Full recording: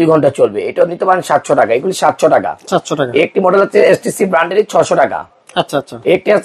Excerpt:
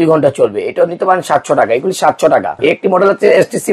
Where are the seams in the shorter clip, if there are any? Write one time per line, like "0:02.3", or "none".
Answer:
0:02.6